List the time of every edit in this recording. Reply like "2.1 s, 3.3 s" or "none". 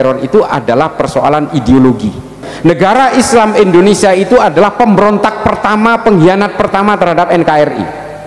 2.4 s

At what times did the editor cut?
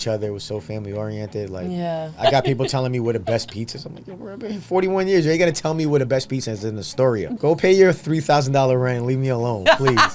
2.2 s, 7.3 s

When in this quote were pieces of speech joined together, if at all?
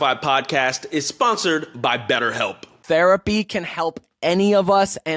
2.7 s

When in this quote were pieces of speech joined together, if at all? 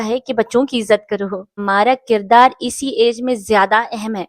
1.5 s

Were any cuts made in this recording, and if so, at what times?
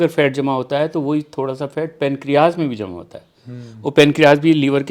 none

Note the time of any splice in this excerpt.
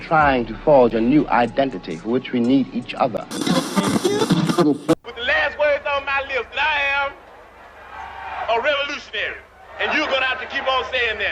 none

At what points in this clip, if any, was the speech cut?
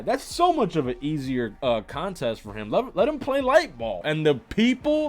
4.0 s

